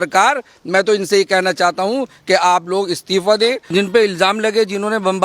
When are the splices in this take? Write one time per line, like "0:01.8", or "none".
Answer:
0:03.6